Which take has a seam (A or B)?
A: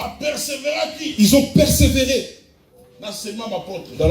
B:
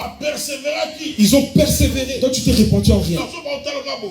B